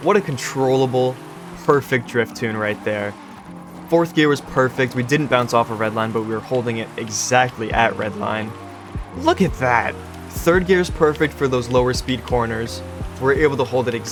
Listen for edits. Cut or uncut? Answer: uncut